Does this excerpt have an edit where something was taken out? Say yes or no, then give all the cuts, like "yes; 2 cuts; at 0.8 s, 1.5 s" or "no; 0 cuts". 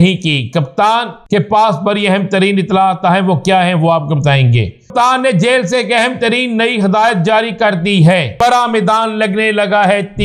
yes; 3 cuts; at 1.1 s, 4.9 s, 8.3 s